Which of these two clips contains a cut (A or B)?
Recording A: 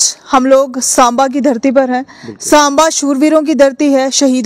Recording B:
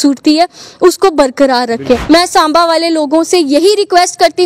B